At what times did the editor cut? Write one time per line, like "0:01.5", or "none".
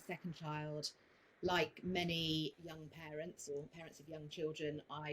0:02.6
0:03.8